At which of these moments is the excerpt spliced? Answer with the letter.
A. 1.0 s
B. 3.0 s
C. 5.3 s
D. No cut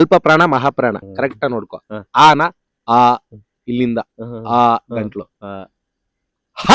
A